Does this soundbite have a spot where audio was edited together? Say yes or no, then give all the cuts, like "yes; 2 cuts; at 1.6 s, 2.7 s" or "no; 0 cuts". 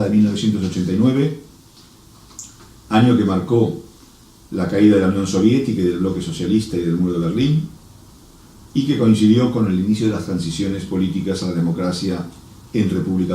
yes; 1 cut; at 11.8 s